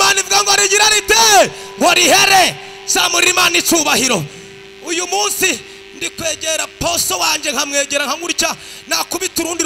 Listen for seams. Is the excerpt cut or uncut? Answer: uncut